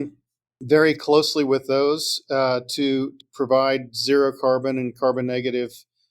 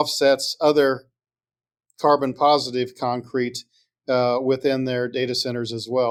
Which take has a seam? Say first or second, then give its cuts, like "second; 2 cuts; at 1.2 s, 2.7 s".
first; 1 cut; at 3.2 s